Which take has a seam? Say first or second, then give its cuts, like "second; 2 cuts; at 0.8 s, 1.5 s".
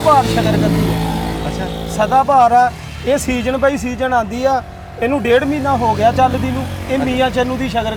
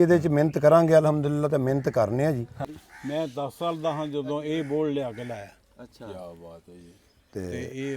second; 1 cut; at 2.6 s